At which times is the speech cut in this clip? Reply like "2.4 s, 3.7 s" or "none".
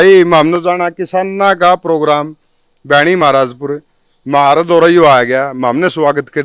none